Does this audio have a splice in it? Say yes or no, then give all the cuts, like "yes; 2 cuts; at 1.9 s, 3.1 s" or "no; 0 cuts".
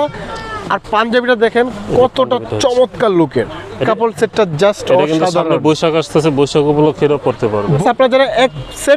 yes; 2 cuts; at 3.8 s, 7.8 s